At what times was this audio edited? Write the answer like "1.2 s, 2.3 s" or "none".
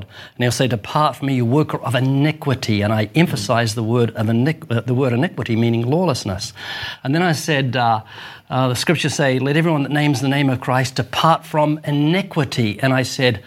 none